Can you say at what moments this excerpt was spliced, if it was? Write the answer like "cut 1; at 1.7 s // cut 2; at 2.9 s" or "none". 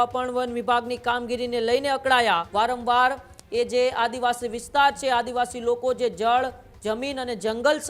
cut 1; at 2.5 s